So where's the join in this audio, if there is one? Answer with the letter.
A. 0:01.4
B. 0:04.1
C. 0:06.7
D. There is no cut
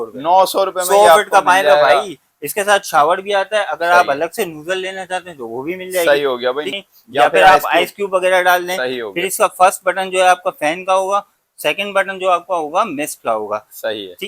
C